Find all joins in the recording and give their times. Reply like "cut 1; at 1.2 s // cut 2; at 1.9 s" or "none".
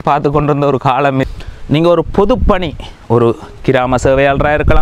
cut 1; at 1.2 s